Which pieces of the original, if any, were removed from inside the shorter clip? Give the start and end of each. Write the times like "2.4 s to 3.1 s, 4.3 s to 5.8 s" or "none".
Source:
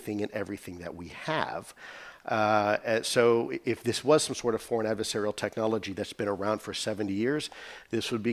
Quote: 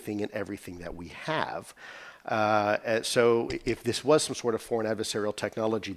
none